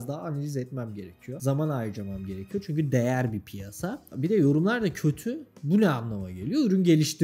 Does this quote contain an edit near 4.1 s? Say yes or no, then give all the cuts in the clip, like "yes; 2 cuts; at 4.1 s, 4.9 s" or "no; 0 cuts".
yes; 1 cut; at 4.1 s